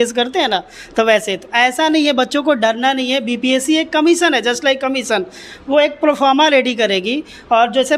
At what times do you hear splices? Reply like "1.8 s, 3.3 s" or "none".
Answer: none